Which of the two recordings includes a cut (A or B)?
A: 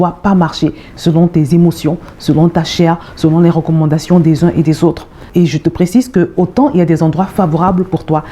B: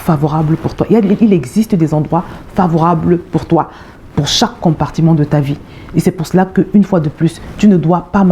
A